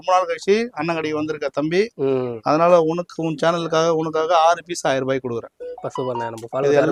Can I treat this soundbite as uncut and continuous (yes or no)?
yes